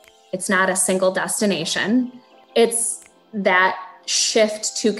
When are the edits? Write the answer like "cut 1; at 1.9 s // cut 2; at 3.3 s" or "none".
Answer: cut 1; at 2.3 s